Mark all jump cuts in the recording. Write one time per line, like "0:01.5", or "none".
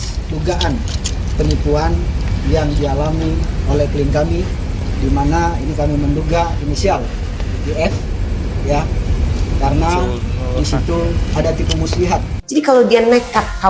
0:12.4

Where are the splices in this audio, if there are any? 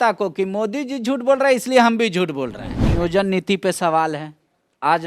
0:02.8

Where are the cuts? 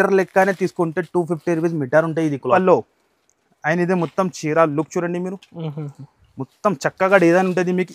0:02.5

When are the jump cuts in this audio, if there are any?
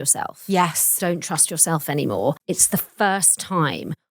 0:02.4

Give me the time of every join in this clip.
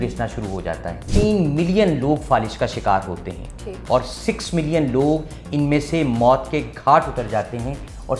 0:01.1

